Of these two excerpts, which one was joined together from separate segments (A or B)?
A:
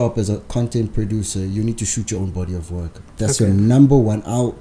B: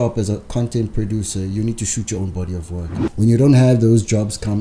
B